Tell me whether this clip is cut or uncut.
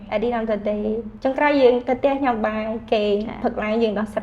cut